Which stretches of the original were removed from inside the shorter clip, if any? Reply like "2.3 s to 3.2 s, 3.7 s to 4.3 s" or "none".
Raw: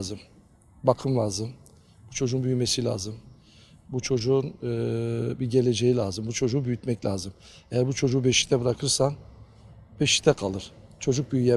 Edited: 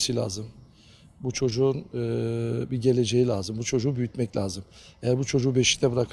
none